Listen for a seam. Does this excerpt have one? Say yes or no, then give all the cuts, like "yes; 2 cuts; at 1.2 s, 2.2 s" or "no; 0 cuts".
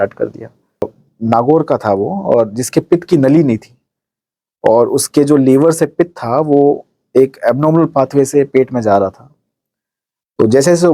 yes; 1 cut; at 1.0 s